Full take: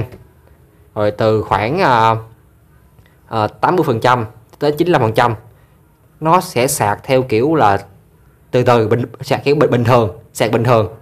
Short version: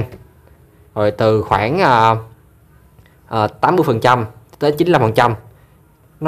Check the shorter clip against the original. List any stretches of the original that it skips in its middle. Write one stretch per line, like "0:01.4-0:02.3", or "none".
none